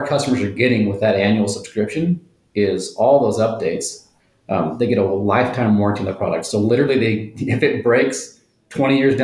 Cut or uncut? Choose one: uncut